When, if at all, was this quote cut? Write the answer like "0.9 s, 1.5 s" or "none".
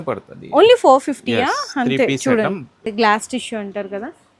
2.9 s